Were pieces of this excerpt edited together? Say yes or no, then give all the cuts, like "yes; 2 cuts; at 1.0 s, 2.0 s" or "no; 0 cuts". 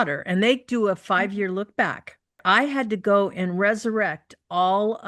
yes; 1 cut; at 2.4 s